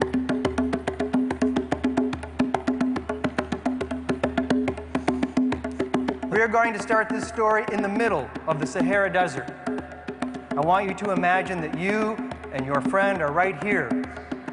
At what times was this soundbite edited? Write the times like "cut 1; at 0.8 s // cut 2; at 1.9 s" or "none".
cut 1; at 11.4 s